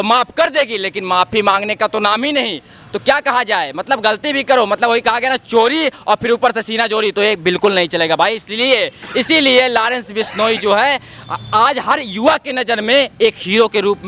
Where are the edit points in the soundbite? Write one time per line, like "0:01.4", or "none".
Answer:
none